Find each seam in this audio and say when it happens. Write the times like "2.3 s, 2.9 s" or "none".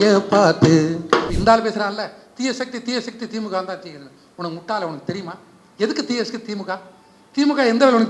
1.3 s